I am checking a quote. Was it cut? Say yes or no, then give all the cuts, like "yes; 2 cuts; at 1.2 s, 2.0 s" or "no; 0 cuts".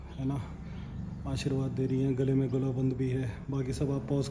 no; 0 cuts